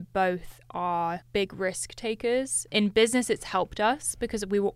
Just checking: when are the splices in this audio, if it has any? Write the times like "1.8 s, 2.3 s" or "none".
1.2 s, 2.7 s